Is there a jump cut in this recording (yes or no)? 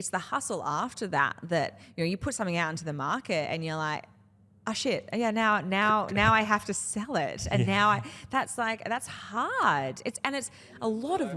no